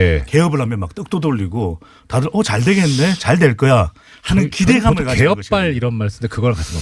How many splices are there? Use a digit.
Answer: 1